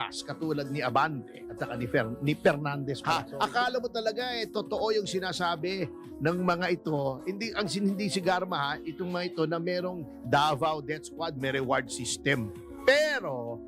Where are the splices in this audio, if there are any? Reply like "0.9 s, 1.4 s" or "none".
3.0 s